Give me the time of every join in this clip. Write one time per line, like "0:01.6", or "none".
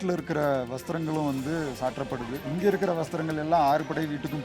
0:02.4